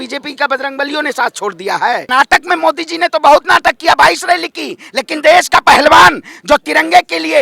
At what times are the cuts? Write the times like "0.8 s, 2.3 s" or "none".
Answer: 2.1 s